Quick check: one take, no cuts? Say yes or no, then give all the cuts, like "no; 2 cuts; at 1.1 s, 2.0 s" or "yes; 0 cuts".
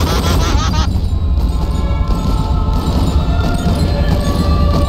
yes; 0 cuts